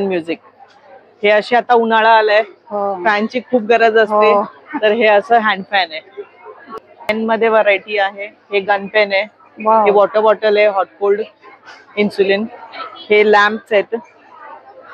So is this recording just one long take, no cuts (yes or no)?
no